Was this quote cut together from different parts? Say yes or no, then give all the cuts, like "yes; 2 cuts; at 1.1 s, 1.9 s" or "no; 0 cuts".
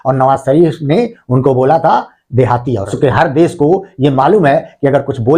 yes; 1 cut; at 2.9 s